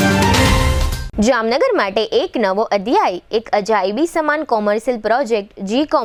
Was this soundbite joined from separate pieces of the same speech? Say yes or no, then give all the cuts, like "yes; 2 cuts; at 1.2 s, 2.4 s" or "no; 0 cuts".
no; 0 cuts